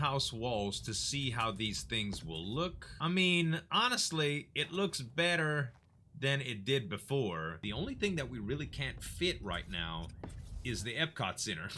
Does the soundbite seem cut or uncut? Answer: cut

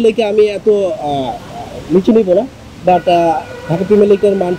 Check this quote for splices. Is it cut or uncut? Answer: uncut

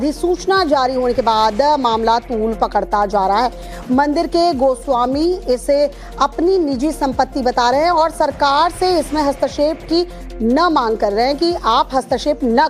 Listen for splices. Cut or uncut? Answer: cut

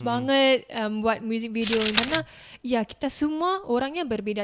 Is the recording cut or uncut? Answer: cut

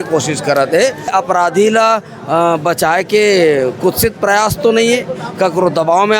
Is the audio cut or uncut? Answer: cut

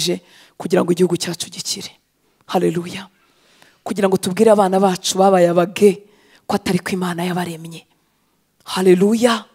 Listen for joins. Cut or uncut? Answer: uncut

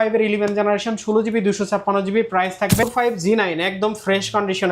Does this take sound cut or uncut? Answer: cut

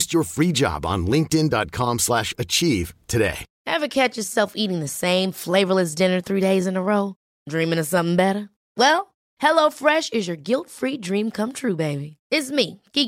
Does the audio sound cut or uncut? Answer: cut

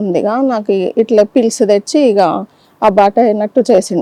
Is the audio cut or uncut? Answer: uncut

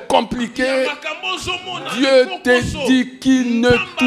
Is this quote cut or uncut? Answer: uncut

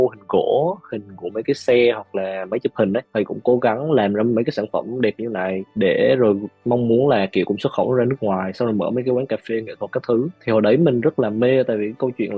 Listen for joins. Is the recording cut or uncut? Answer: uncut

